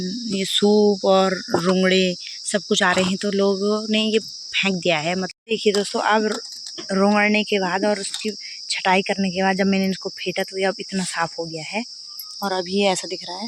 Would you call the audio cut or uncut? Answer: cut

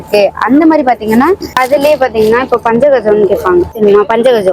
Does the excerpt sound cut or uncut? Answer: cut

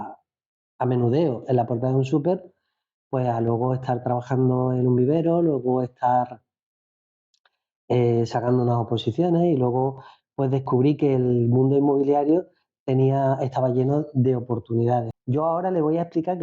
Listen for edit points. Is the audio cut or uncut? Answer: cut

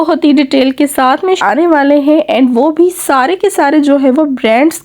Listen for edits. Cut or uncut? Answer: cut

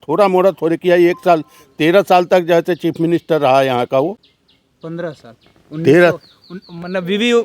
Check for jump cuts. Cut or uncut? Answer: uncut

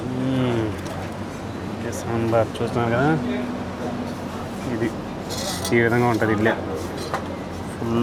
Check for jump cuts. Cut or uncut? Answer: uncut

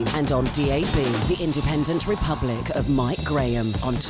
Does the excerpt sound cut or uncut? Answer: uncut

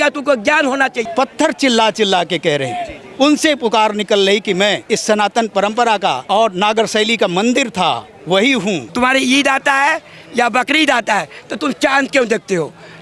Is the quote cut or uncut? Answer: cut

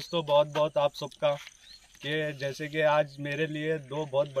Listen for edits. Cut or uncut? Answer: uncut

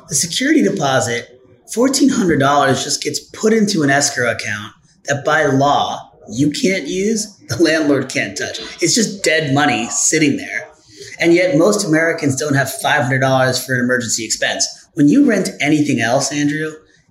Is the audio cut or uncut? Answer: cut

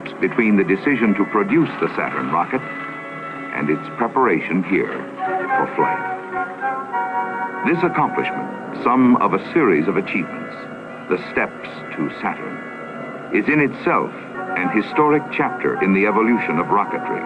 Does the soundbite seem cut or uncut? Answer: cut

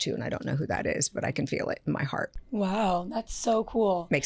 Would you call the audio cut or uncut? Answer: uncut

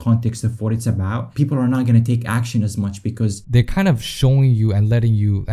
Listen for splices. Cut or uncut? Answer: cut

